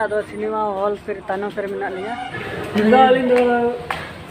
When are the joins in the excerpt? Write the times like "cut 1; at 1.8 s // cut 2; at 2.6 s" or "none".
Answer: cut 1; at 2.3 s